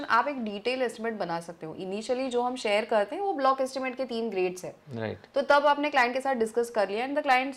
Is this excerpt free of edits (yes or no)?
yes